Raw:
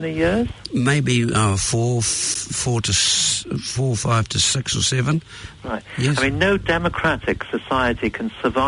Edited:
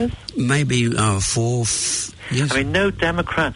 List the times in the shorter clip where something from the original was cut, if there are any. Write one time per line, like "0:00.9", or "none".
0:02.2

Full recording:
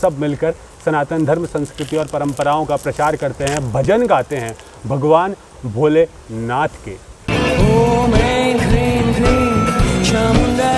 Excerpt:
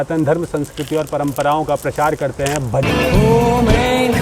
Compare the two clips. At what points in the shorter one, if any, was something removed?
0:02.8

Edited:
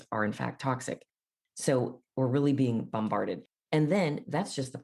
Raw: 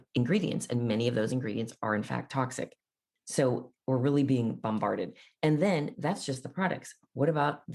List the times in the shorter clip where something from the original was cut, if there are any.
none

